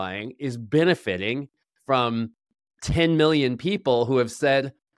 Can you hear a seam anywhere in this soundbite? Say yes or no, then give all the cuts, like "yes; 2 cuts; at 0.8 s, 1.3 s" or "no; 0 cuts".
no; 0 cuts